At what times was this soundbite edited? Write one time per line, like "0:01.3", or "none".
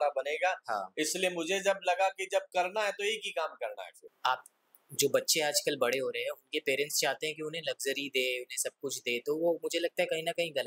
0:04.0